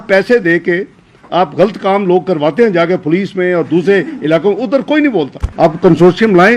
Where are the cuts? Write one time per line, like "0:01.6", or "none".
0:05.4